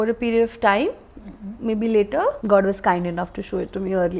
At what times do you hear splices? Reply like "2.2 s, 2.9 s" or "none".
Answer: 2.4 s